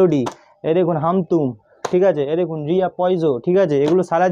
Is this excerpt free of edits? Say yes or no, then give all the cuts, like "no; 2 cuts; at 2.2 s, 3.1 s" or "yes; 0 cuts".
yes; 0 cuts